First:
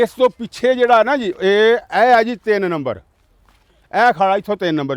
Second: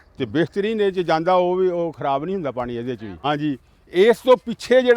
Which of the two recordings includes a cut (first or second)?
second